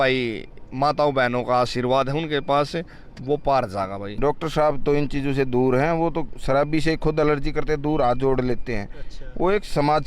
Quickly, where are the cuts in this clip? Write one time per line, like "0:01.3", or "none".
0:04.1